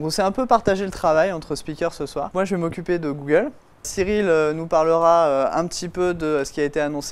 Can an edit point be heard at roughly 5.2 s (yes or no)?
no